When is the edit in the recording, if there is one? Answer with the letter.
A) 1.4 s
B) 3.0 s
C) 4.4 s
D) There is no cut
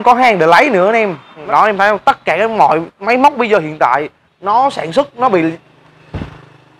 A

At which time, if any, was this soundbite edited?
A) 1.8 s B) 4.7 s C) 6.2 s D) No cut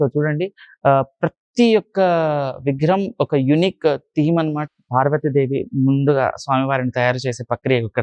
B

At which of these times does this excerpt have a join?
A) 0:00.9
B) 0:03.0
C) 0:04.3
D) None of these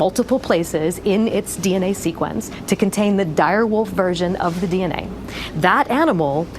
A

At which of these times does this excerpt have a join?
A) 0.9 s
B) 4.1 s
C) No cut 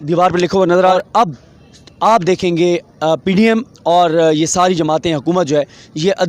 A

